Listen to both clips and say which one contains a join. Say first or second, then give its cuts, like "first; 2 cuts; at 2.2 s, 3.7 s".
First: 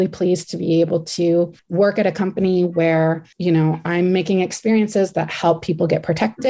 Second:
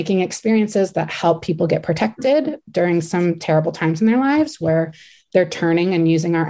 first; 2 cuts; at 1.6 s, 3.3 s